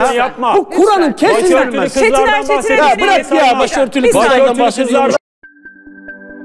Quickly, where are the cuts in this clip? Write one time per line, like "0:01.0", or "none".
0:05.2